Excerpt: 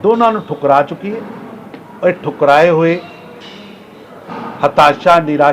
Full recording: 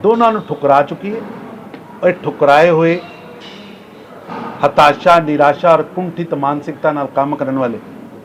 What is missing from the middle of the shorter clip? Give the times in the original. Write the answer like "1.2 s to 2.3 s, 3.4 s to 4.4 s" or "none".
none